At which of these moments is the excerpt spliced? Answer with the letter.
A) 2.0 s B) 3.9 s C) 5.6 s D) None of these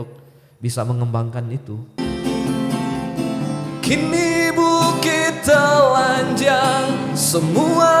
A